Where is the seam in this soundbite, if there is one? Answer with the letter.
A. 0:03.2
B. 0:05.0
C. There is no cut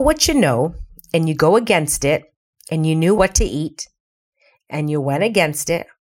A